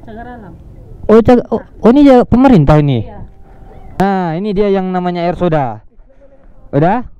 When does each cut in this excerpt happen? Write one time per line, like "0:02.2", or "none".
0:04.0